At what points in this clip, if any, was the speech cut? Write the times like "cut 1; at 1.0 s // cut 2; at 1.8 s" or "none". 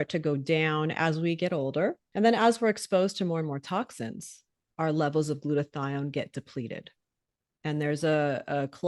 cut 1; at 2.0 s